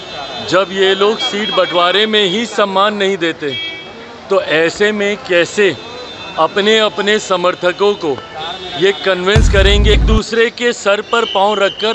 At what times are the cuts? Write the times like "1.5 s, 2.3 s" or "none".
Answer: 9.9 s